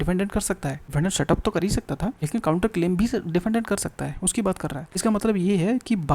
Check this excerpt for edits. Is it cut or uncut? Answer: cut